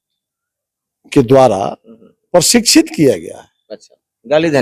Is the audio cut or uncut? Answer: uncut